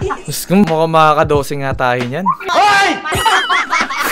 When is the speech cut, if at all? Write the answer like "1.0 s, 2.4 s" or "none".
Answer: 3.1 s